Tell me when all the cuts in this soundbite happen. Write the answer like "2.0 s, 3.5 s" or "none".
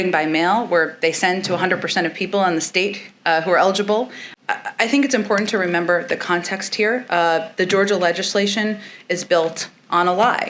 4.2 s

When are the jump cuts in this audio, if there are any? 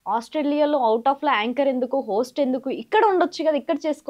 none

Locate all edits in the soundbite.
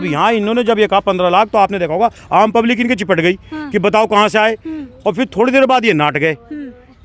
none

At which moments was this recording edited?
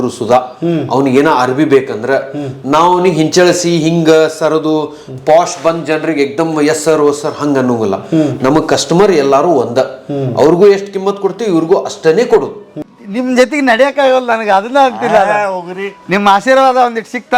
12.7 s

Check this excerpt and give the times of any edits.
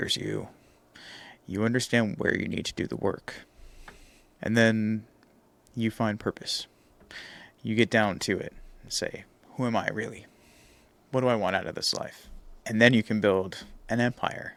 none

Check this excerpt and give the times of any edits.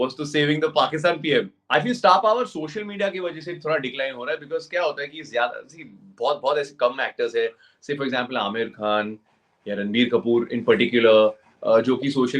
1.6 s

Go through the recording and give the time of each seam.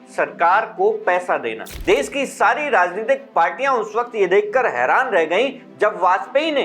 1.7 s

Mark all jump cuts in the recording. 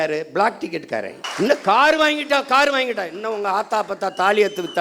1.2 s

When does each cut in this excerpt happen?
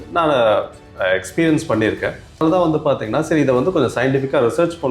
2.4 s

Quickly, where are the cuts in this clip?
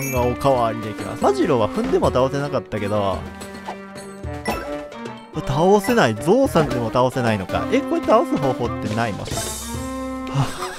1.1 s

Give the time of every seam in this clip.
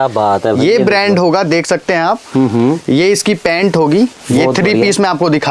none

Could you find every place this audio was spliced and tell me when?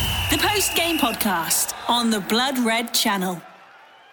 none

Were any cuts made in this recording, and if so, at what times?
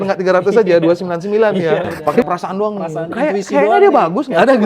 2.3 s

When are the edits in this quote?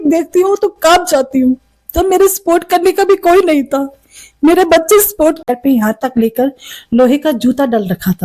5.5 s

